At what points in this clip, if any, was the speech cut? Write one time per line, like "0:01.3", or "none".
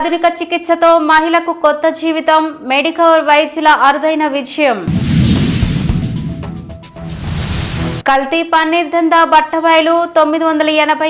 none

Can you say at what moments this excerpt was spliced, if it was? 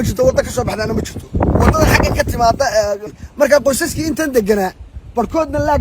0:03.0

